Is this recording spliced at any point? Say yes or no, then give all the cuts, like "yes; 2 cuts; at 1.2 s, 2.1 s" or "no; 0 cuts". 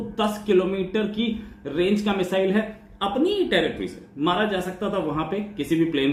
no; 0 cuts